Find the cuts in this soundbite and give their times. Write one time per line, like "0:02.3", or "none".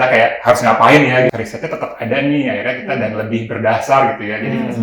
0:01.3